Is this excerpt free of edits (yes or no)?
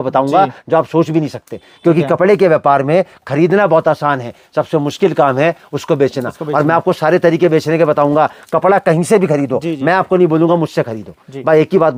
yes